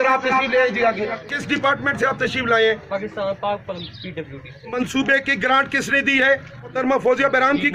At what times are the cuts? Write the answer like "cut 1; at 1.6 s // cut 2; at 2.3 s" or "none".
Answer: cut 1; at 1.3 s // cut 2; at 4.6 s // cut 3; at 6.7 s